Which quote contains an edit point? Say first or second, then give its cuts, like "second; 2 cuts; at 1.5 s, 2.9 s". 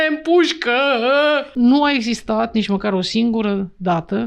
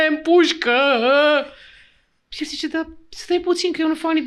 first; 1 cut; at 1.5 s